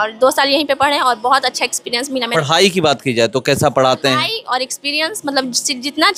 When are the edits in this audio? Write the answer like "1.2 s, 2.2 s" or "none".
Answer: none